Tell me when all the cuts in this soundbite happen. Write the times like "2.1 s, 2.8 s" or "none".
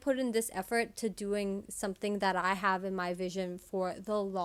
none